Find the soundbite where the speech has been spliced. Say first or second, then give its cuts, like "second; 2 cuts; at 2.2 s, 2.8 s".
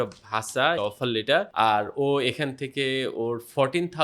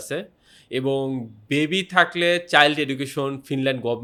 first; 1 cut; at 1.1 s